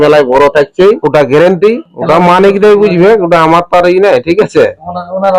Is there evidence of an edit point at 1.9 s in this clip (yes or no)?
yes